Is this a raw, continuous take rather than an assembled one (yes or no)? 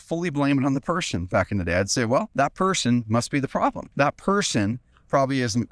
no